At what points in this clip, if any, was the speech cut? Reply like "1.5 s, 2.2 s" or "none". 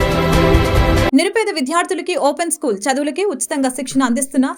0.9 s